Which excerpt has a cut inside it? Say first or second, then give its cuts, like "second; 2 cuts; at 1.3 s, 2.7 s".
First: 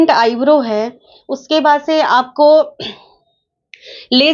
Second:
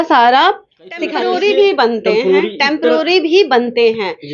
second; 1 cut; at 1.1 s